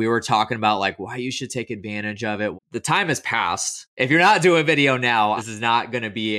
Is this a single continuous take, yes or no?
no